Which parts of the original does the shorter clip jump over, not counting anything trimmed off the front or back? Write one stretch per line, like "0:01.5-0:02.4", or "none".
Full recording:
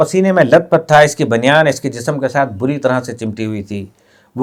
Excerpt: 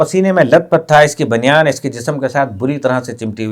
none